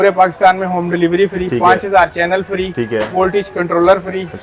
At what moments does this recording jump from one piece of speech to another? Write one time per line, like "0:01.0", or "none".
none